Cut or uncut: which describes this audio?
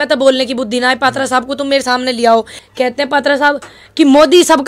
cut